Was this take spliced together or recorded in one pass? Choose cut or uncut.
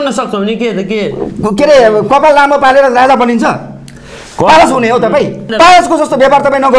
cut